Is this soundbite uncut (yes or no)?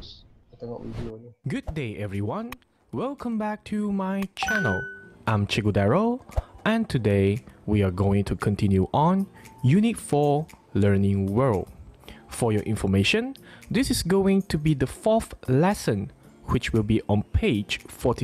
yes